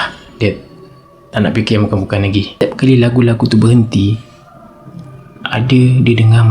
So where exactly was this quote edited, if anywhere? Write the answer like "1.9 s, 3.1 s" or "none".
2.5 s